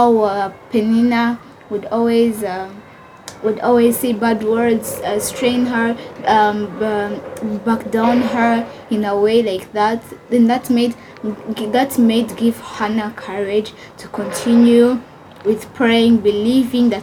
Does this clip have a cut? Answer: no; 0 cuts

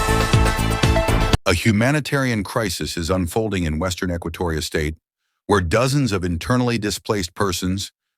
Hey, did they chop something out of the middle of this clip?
yes; 1 cut; at 1.4 s

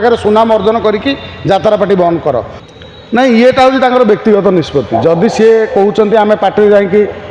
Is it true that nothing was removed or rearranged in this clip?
no; 1 cut; at 2.6 s

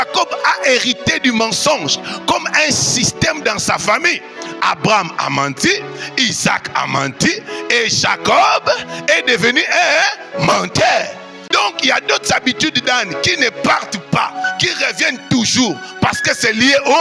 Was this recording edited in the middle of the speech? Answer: yes; 1 cut; at 11.3 s

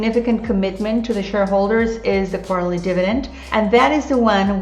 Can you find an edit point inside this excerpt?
yes; 1 cut; at 3.4 s

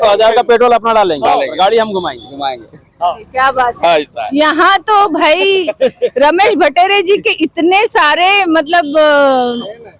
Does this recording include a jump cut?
no; 0 cuts

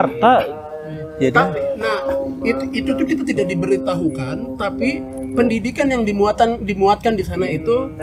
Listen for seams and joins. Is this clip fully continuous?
yes; 0 cuts

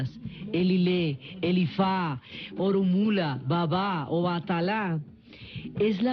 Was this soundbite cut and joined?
yes; 1 cut; at 5.0 s

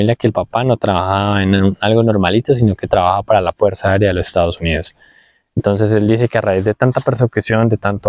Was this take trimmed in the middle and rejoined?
no; 0 cuts

